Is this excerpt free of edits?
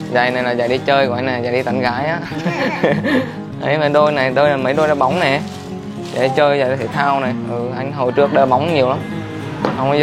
yes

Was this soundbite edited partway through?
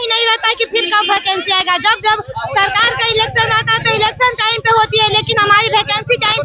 no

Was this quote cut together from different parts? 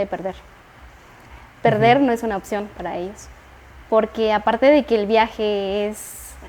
no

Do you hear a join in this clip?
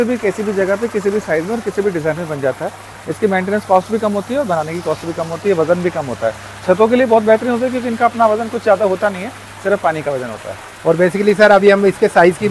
no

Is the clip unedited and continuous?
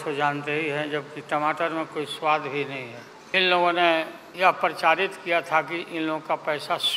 no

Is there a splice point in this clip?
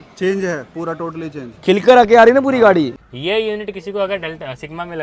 yes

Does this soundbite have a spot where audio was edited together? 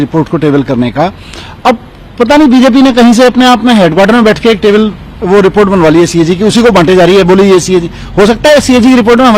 no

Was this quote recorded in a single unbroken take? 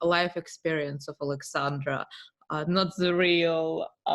yes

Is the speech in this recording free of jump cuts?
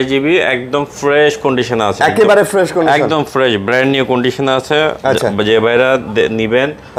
yes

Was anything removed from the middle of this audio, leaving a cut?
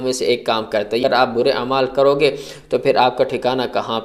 yes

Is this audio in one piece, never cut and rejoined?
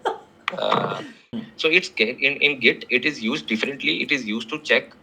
no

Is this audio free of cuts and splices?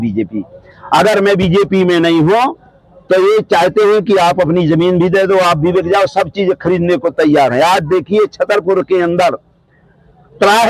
yes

